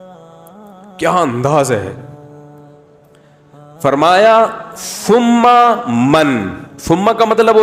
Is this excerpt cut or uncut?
cut